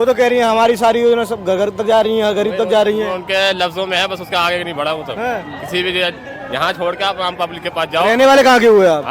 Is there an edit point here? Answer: no; 0 cuts

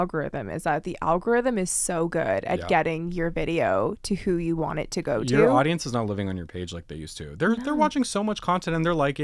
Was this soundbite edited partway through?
no; 0 cuts

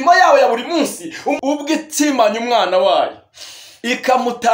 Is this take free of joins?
no; 1 cut; at 1.4 s

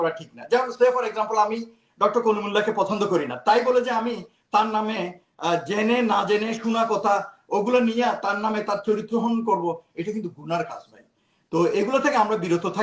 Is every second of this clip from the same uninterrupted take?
yes; 0 cuts

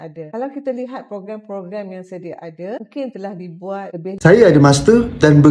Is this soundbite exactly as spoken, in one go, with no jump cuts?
no; 1 cut; at 4.2 s

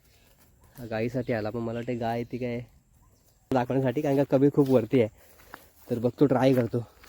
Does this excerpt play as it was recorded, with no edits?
no; 1 cut; at 3.5 s

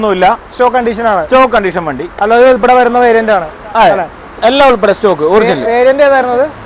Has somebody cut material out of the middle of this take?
no; 0 cuts

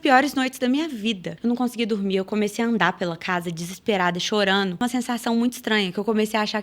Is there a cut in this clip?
yes; 2 cuts; at 1.3 s, 4.8 s

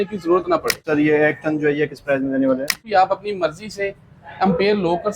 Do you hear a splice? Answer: yes; 2 cuts; at 0.8 s, 2.8 s

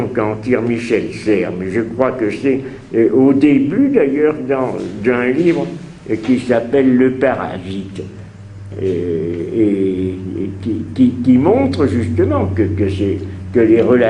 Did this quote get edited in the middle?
no; 0 cuts

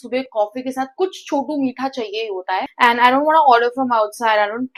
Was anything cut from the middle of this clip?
no; 0 cuts

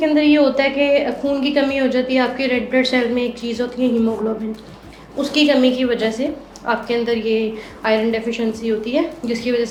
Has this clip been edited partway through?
no; 0 cuts

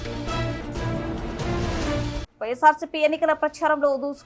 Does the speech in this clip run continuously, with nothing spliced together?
yes; 0 cuts

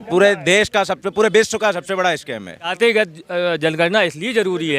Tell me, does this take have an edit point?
yes; 1 cut; at 2.7 s

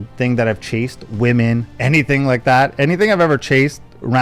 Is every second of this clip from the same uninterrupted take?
yes; 0 cuts

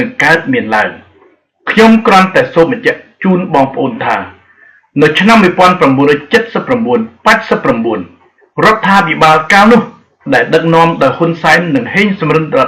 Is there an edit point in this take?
yes; 1 cut; at 1.6 s

